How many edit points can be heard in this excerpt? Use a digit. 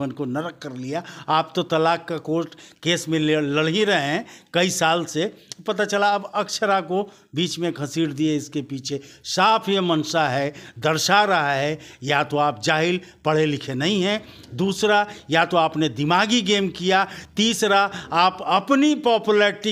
0